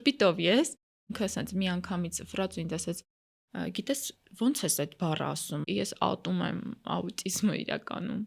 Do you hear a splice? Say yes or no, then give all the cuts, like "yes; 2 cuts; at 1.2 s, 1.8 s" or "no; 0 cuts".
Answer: yes; 2 cuts; at 1.1 s, 5.7 s